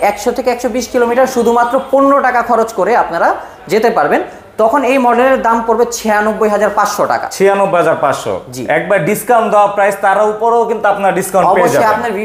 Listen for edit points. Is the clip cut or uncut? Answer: uncut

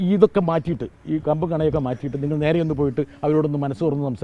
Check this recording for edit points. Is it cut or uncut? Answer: uncut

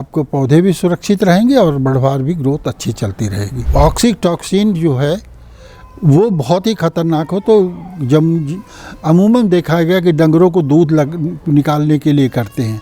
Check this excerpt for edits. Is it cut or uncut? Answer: cut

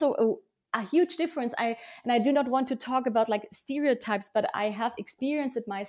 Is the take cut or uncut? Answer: uncut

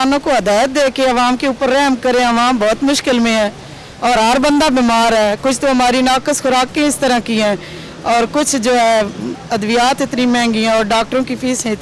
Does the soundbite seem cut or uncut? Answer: uncut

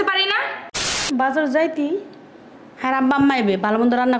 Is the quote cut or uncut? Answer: cut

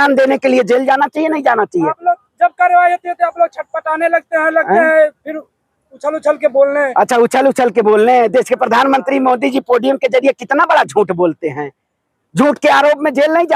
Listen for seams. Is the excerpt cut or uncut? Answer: uncut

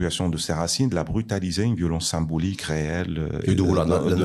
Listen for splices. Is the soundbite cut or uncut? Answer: uncut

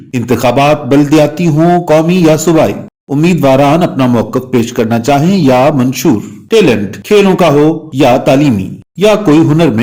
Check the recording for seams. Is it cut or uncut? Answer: uncut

